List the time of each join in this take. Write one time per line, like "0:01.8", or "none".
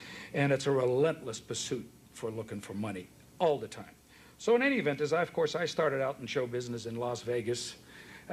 none